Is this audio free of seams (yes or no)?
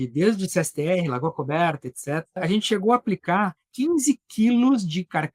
no